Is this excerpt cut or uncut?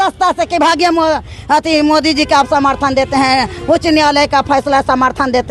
uncut